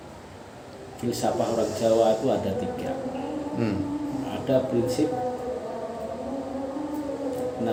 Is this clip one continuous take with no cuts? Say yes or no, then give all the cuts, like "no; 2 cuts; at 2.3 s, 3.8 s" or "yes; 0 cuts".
yes; 0 cuts